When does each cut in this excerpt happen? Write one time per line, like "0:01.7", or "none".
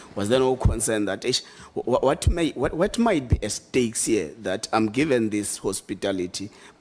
none